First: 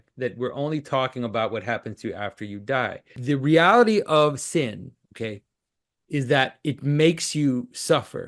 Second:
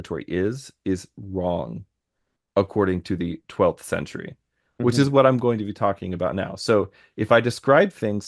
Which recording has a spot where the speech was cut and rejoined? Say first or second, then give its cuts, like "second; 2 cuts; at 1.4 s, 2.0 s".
first; 1 cut; at 3.2 s